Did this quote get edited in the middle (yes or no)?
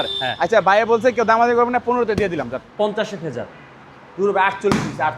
yes